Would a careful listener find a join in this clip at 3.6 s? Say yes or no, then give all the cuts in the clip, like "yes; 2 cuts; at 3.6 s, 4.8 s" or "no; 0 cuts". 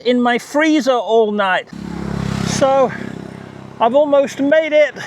no; 1 cut; at 1.7 s